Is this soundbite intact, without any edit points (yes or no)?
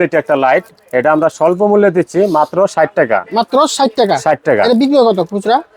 yes